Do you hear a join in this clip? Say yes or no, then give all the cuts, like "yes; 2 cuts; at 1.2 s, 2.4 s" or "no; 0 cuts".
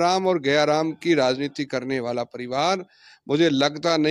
no; 0 cuts